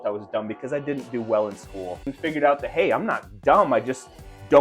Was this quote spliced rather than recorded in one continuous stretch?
yes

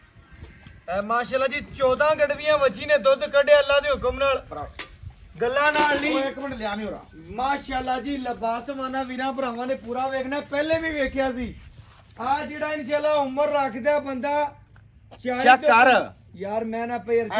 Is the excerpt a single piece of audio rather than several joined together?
yes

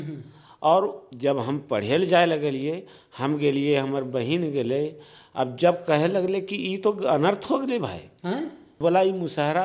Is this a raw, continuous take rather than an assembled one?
no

